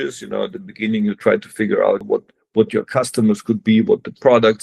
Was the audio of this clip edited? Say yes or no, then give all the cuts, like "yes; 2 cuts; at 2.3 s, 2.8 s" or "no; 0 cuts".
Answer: yes; 1 cut; at 2.0 s